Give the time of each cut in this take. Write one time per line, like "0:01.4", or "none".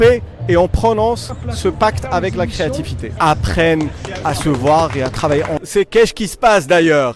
0:03.0
0:05.6